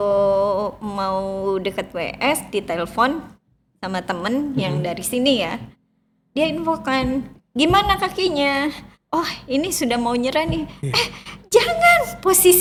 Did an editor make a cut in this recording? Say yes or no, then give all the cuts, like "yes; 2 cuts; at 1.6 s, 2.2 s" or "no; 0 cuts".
no; 0 cuts